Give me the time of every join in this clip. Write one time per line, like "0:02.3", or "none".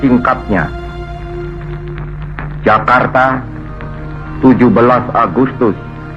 none